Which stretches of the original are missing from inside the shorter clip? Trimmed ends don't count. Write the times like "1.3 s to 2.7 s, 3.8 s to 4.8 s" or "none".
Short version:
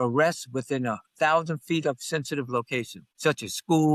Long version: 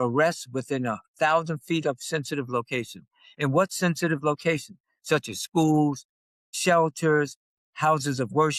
3.0 s to 4.9 s